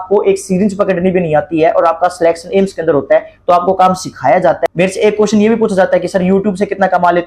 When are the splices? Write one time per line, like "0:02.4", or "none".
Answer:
0:04.6